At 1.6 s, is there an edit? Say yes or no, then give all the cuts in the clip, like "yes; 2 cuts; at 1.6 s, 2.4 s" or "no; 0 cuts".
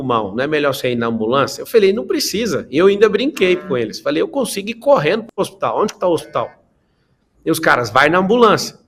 no; 0 cuts